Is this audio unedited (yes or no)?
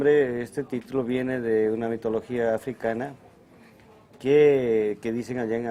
yes